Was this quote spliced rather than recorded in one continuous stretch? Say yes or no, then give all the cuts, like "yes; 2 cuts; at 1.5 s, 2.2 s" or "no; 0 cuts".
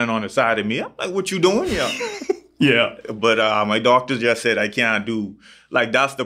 no; 0 cuts